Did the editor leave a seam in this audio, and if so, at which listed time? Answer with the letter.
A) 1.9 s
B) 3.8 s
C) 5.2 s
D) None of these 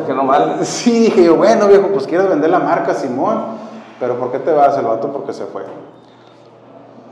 D